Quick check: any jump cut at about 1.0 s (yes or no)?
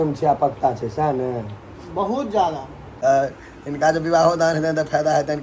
no